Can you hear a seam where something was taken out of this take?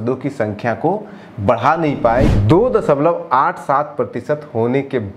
yes; 1 cut; at 2.3 s

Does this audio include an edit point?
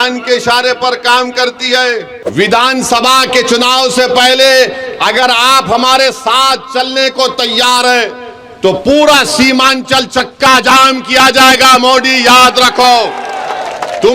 yes; 1 cut; at 2.2 s

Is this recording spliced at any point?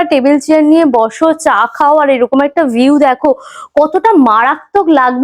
no; 0 cuts

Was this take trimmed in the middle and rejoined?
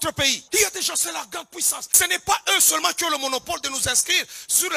yes; 1 cut; at 1.8 s

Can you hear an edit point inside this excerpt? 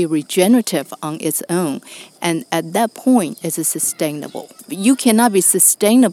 yes; 1 cut; at 4.6 s

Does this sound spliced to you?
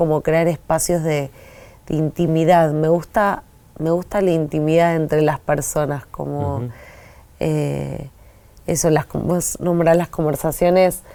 no; 0 cuts

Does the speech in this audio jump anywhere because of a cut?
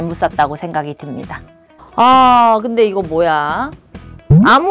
yes; 1 cut; at 1.9 s

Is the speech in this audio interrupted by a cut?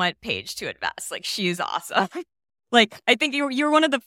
no; 0 cuts

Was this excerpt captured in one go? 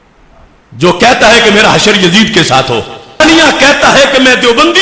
no; 1 cut; at 3.2 s

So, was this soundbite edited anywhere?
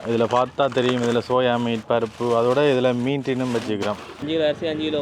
yes; 1 cut; at 4.1 s

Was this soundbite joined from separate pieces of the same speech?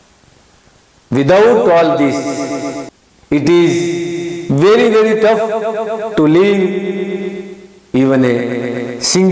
no; 0 cuts

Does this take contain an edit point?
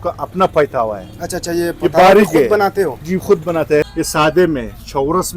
yes; 1 cut; at 3.8 s

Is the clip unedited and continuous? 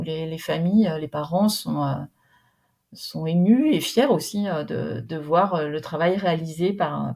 yes; 0 cuts

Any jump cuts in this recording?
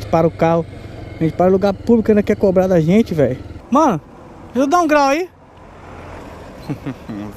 yes; 2 cuts; at 3.5 s, 6.2 s

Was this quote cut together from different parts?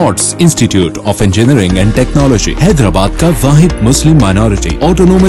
no; 0 cuts

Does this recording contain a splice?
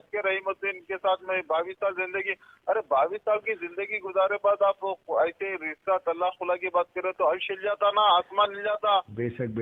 no; 0 cuts

